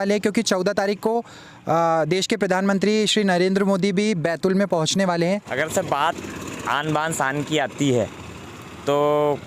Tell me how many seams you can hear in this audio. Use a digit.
1